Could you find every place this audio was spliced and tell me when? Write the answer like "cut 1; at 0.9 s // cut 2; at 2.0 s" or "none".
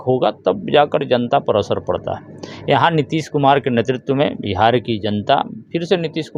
none

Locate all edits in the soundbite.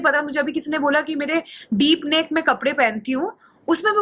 none

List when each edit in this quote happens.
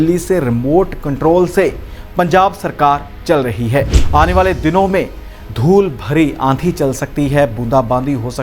cut 1; at 4.0 s

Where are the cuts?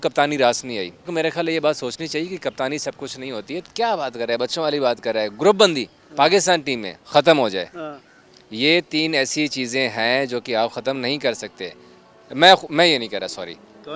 cut 1; at 1.1 s // cut 2; at 3.6 s

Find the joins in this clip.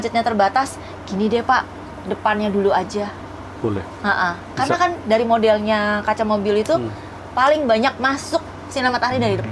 none

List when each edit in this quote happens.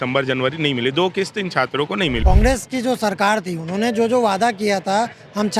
cut 1; at 2.2 s

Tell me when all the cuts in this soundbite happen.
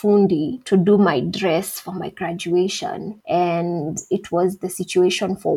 none

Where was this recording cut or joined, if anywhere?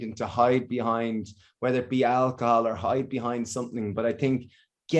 none

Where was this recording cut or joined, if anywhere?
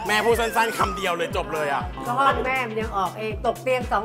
cut 1; at 1.9 s

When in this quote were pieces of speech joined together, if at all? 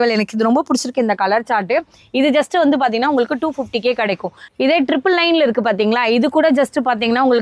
none

